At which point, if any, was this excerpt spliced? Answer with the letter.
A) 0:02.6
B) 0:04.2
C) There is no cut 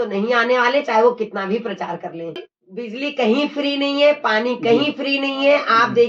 A